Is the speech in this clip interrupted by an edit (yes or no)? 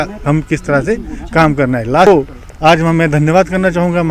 no